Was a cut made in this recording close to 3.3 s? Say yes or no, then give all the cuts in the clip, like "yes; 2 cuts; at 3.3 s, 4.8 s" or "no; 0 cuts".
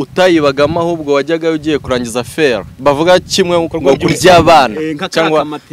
no; 0 cuts